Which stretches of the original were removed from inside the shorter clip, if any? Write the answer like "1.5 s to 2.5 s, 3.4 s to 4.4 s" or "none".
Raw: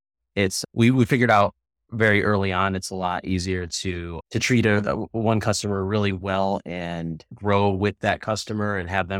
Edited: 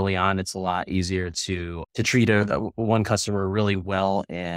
none